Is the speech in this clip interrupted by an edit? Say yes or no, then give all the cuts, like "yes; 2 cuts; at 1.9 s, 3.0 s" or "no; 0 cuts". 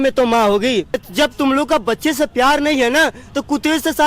yes; 1 cut; at 0.9 s